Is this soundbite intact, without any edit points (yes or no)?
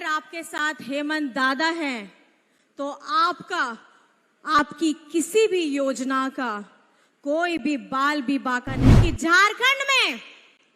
no